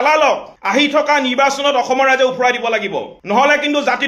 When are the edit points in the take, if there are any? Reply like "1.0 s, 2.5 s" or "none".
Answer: none